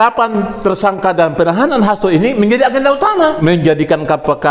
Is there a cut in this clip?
yes; 1 cut; at 3.4 s

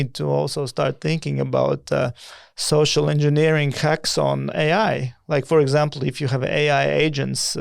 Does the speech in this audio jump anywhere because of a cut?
no; 0 cuts

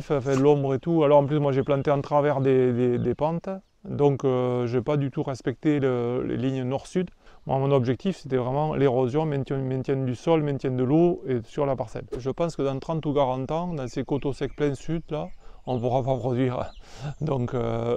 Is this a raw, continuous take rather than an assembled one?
no; 2 cuts; at 7.3 s, 12.1 s

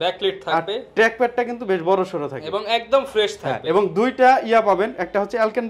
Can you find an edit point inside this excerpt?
no; 0 cuts

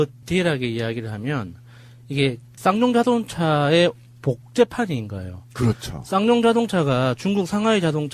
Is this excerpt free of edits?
no; 1 cut; at 2.6 s

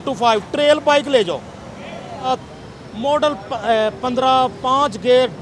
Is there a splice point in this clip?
yes; 1 cut; at 2.3 s

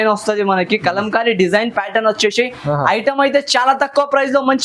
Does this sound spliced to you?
no; 0 cuts

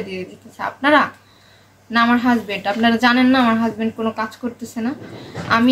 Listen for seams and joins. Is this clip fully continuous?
yes; 0 cuts

